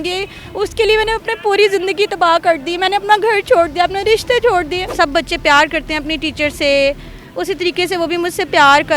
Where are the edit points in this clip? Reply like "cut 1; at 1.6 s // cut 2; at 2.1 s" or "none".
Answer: cut 1; at 4.9 s